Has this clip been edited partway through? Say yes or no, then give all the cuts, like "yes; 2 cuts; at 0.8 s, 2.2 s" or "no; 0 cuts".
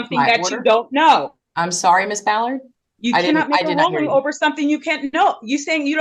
no; 0 cuts